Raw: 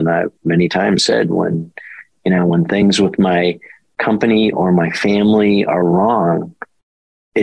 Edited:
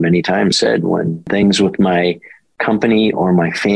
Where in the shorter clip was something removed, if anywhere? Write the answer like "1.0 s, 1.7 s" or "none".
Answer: 1.3 s